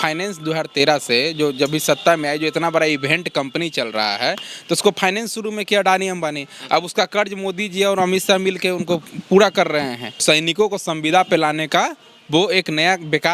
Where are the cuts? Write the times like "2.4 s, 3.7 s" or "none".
10.2 s